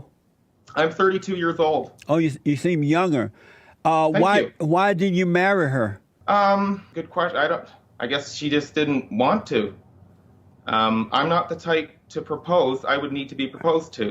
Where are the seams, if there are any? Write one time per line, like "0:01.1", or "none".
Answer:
0:06.1
0:06.9
0:07.8